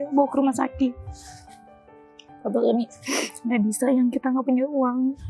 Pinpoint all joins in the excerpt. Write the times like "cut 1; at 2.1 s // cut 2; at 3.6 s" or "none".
none